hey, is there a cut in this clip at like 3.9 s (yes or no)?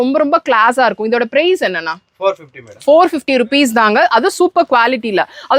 no